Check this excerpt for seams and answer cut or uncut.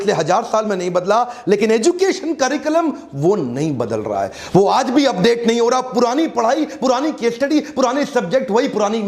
uncut